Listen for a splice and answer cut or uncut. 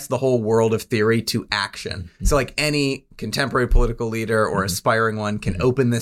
uncut